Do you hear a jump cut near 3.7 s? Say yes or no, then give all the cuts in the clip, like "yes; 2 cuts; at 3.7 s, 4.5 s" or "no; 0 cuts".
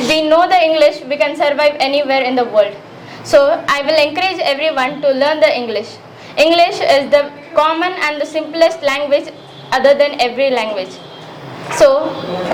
no; 0 cuts